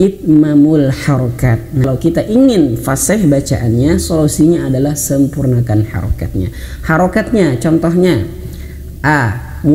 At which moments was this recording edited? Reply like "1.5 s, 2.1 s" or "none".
1.9 s